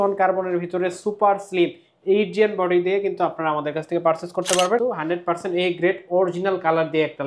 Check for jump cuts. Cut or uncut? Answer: cut